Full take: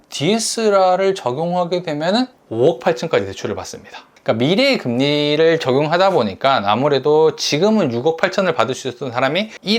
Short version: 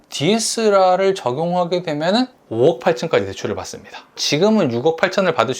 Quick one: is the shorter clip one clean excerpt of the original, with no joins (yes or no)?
no